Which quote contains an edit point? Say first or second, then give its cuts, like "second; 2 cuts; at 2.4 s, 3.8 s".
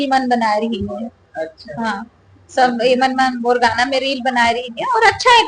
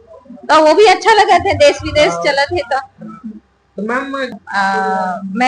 second; 1 cut; at 4.3 s